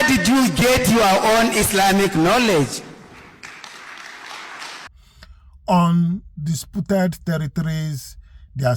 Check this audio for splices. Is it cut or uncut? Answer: cut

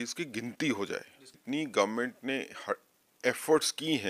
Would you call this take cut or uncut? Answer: cut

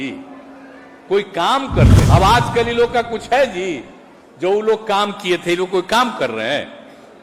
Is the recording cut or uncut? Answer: cut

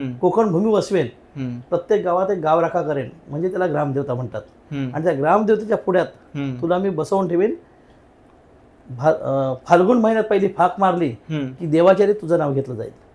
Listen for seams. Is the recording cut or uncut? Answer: uncut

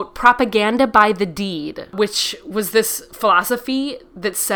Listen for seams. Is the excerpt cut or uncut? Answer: uncut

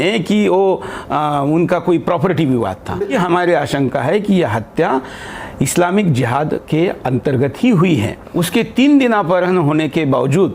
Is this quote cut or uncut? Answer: cut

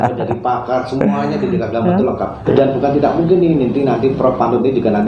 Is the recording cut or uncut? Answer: cut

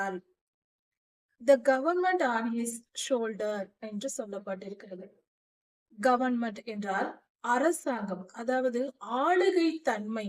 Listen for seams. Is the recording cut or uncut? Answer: cut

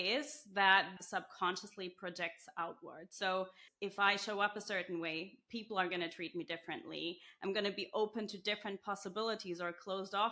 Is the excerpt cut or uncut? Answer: cut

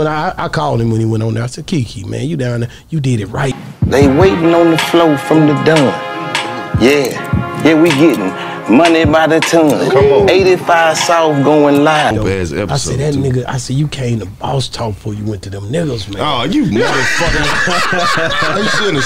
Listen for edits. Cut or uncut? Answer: uncut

